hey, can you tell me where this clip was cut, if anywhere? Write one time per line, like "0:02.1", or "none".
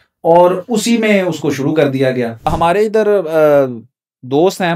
0:02.5